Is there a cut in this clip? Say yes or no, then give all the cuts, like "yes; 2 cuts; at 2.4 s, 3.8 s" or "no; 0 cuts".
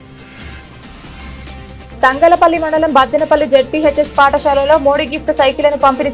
yes; 2 cuts; at 0.8 s, 1.9 s